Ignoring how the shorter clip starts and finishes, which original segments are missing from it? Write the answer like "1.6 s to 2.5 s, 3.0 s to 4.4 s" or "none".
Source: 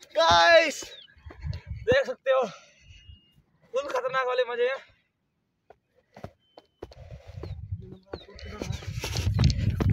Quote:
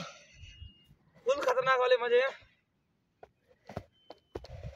none